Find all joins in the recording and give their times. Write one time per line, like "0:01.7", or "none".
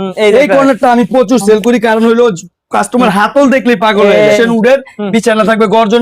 0:04.4